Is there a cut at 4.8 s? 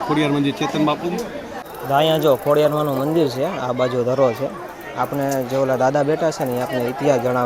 no; 1 cut; at 1.7 s

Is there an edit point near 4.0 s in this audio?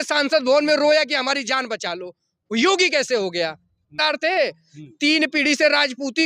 yes; 1 cut; at 4.0 s

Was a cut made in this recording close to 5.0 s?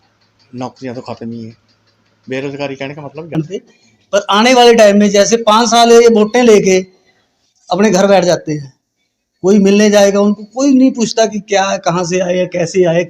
no; 1 cut; at 3.4 s

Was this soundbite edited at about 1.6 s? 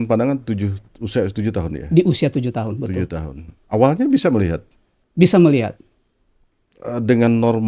no; 1 cut; at 3.5 s

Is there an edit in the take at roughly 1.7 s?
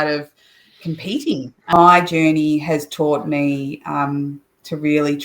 yes; 1 cut; at 1.7 s

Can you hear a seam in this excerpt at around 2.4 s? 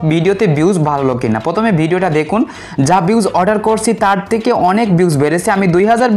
no; 0 cuts

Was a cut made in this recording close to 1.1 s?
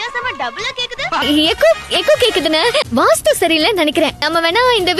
no; 0 cuts

